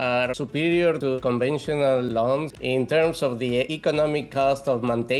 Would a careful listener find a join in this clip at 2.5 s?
yes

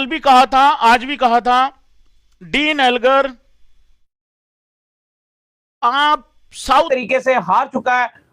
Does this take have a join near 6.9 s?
yes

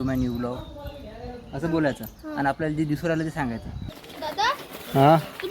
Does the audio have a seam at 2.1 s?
no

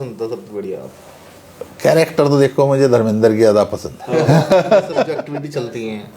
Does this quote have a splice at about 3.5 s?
no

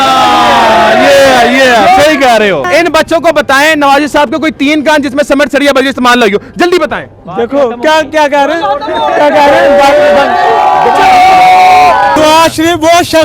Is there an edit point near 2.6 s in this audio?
yes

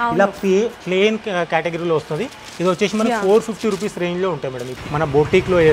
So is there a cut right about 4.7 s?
yes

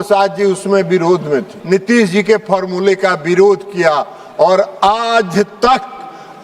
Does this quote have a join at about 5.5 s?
no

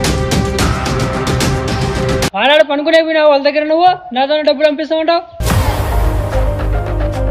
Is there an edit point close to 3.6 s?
no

